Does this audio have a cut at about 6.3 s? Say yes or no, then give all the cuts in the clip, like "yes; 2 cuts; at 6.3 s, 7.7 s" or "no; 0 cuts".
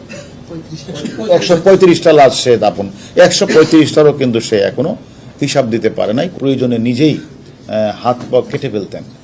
yes; 1 cut; at 6.3 s